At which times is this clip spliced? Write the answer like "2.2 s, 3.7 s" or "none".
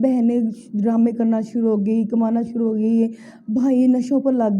none